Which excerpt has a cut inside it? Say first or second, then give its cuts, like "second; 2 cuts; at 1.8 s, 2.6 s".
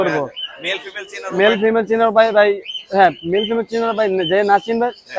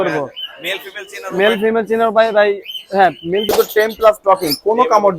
second; 1 cut; at 3.5 s